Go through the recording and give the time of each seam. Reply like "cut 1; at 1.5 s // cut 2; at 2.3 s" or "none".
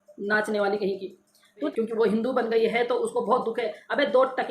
cut 1; at 1.7 s